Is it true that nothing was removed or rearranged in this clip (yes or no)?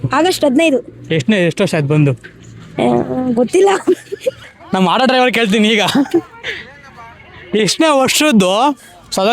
no